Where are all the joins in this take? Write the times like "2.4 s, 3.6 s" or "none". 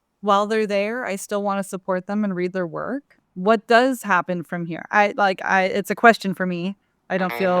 3.1 s